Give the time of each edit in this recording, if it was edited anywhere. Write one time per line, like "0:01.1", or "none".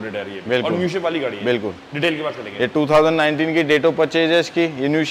none

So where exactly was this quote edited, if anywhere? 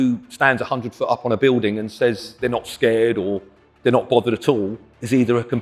0:02.3

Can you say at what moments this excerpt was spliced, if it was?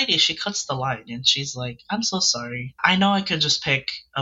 0:02.8

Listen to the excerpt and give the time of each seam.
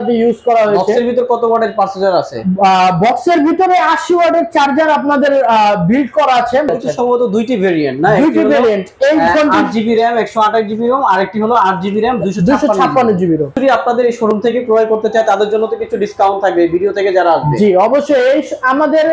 0:06.7
0:13.5

